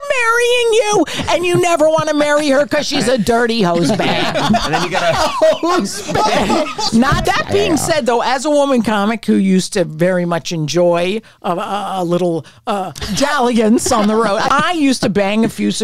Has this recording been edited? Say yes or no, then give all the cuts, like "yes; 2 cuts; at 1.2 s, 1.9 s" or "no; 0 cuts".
yes; 2 cuts; at 6.9 s, 14.5 s